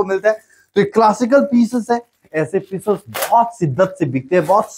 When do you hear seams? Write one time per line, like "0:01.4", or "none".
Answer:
none